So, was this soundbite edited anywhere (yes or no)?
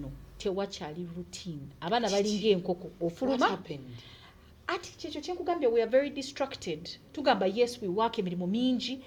no